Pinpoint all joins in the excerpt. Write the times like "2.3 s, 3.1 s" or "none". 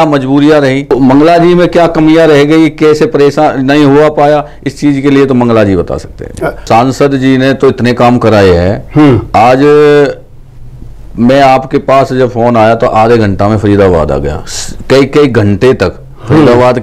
0.9 s, 6.6 s